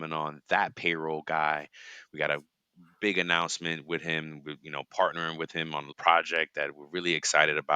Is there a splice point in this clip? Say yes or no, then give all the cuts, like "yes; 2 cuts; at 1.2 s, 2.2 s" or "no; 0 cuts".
yes; 1 cut; at 5.9 s